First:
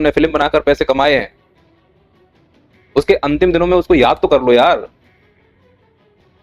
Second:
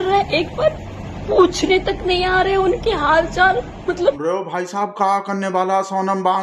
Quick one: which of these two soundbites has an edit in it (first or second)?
second